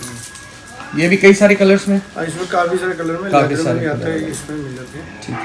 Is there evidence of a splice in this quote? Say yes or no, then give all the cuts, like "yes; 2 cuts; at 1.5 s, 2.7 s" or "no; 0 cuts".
no; 0 cuts